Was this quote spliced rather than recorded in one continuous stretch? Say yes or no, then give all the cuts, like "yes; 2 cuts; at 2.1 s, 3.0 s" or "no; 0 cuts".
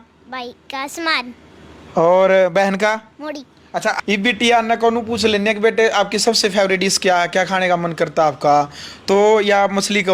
yes; 1 cut; at 4.0 s